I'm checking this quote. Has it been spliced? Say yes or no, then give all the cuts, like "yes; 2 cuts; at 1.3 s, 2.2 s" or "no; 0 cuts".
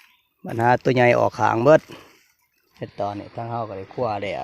yes; 1 cut; at 2.7 s